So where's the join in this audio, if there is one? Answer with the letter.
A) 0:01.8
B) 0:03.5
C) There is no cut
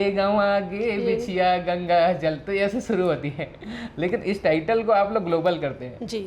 C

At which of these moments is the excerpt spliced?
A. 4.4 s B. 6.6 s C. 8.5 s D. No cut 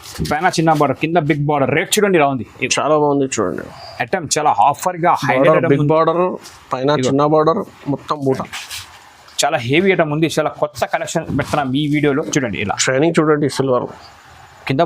C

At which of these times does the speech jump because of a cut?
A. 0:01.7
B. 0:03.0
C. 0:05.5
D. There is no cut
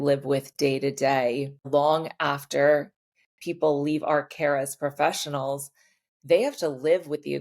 A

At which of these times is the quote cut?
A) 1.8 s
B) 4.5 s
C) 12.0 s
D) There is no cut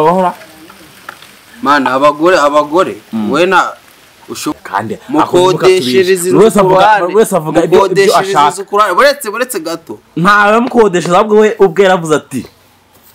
B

